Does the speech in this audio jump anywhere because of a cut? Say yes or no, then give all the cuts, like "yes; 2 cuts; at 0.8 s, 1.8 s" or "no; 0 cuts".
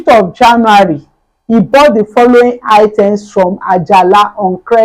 no; 0 cuts